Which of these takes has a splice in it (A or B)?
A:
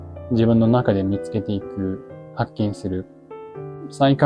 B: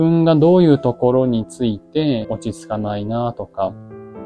B